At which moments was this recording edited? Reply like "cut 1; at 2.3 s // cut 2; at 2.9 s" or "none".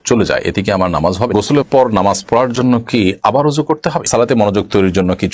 cut 1; at 1.3 s // cut 2; at 4.1 s